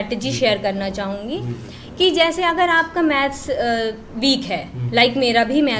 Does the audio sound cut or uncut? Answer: uncut